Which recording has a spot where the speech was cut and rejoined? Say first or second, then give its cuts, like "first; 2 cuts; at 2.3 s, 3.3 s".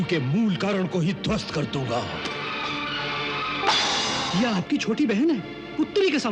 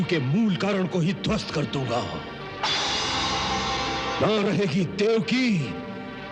first; 2 cuts; at 2.3 s, 4.2 s